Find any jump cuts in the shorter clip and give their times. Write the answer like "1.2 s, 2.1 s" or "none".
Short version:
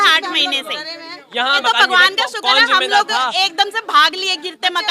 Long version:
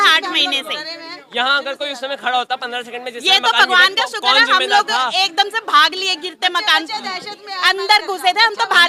1.6 s